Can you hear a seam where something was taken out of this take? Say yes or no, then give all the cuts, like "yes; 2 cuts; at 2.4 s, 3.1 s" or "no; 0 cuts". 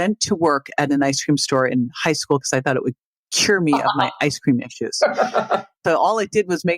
yes; 1 cut; at 5.8 s